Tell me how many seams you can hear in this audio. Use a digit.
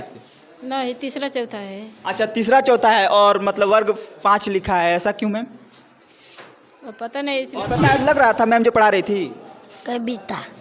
1